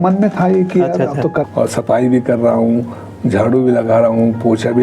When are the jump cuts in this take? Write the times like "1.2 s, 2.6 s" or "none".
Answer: 1.5 s